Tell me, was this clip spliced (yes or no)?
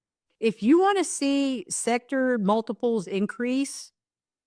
no